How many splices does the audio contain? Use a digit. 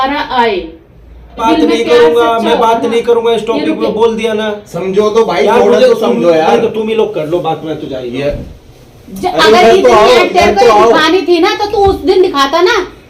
1